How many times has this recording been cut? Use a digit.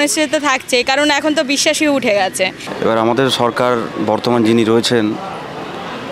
1